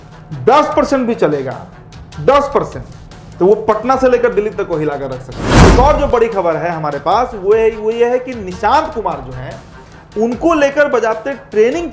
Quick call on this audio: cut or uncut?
cut